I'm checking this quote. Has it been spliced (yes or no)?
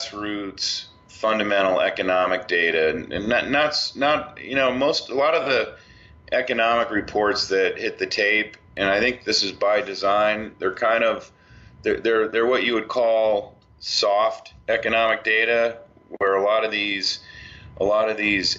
yes